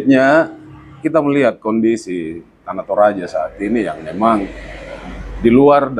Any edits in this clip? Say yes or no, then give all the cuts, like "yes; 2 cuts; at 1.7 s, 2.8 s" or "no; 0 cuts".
yes; 1 cut; at 1.0 s